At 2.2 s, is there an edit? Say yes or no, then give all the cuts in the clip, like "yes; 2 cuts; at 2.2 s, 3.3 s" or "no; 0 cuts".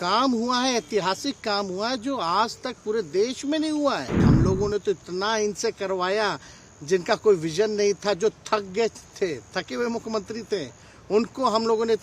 no; 1 cut; at 4.2 s